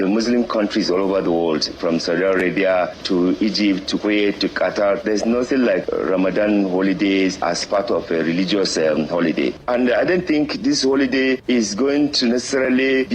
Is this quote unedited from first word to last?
no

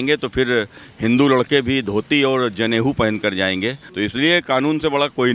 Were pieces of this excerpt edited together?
yes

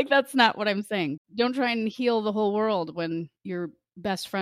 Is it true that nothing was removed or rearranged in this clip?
no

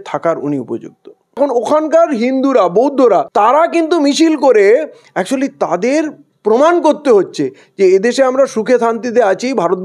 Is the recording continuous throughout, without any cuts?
no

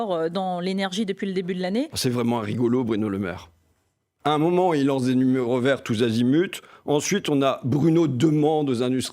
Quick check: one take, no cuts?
no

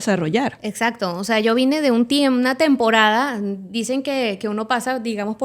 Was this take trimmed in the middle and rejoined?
no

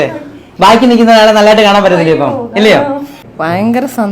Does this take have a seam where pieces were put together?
yes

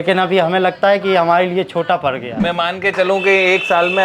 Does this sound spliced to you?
yes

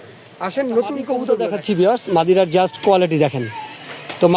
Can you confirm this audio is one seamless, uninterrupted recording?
no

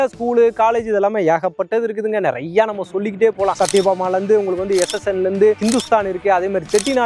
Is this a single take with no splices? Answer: no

